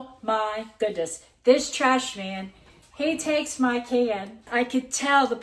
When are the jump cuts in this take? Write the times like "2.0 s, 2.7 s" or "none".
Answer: 4.4 s